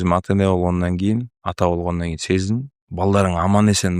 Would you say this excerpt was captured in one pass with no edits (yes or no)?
no